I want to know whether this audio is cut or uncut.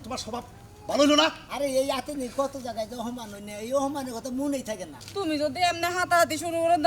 cut